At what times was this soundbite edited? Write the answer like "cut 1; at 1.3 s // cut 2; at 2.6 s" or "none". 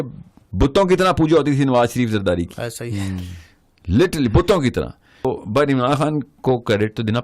cut 1; at 5.3 s

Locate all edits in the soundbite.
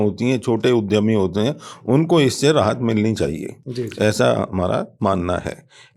none

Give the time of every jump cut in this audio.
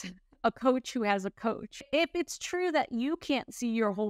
cut 1; at 1.9 s

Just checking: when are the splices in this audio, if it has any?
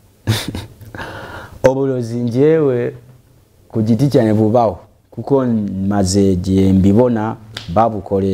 none

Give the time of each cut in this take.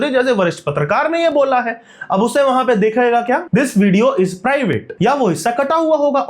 cut 1; at 3.4 s

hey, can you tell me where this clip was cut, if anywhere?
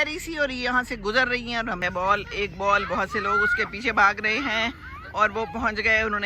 cut 1; at 1.8 s

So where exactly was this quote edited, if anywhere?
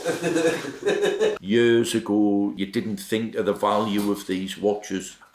cut 1; at 1.4 s // cut 2; at 2.5 s

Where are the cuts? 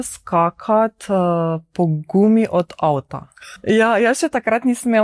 cut 1; at 3.5 s

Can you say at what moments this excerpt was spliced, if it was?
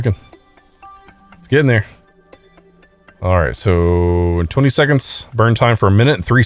none

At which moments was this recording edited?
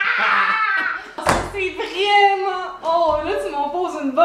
cut 1; at 1.2 s

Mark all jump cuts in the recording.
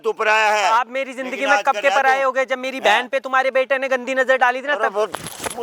none

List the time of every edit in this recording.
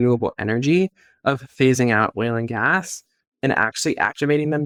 none

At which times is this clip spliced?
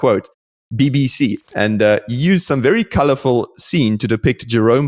cut 1; at 1.4 s

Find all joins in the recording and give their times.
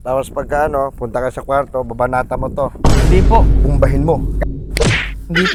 none

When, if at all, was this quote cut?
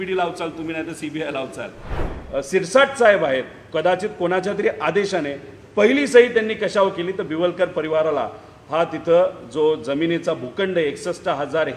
cut 1; at 2.2 s

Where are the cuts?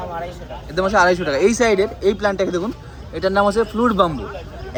none

